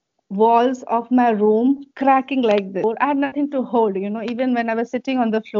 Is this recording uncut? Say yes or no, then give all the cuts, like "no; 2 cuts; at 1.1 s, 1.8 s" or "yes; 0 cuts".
no; 1 cut; at 2.8 s